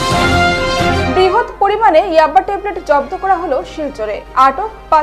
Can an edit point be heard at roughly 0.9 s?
yes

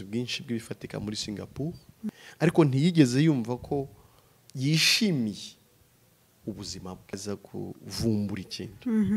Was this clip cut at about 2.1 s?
yes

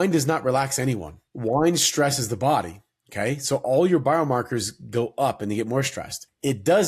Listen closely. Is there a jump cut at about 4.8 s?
no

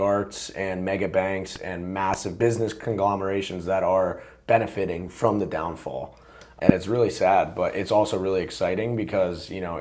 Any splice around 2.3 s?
yes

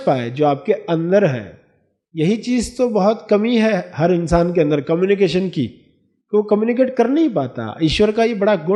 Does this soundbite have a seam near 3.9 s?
no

